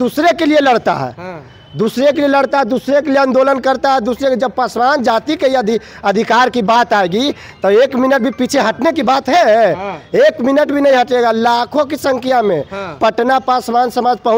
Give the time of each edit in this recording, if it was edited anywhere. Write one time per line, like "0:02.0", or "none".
none

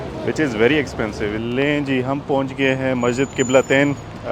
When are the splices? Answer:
0:01.4

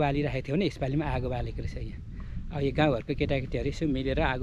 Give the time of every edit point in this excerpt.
none

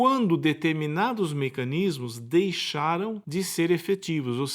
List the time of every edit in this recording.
0:03.2

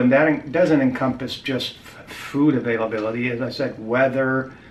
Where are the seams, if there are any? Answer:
none

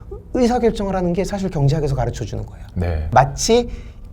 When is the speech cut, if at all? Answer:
0:03.0

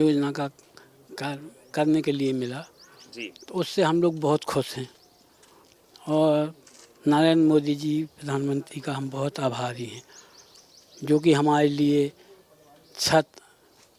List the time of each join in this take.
none

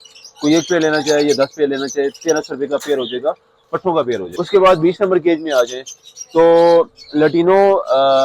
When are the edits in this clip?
0:04.3

